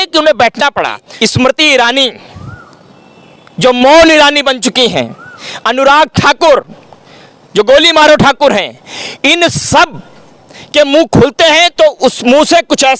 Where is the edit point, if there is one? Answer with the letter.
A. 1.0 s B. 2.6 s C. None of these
A